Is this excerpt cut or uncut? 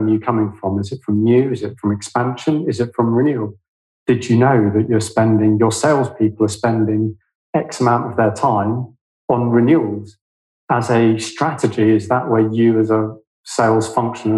uncut